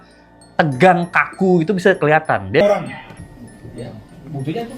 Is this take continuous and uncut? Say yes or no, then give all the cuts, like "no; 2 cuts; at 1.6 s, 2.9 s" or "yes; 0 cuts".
no; 1 cut; at 2.6 s